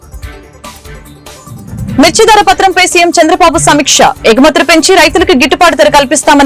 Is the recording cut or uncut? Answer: cut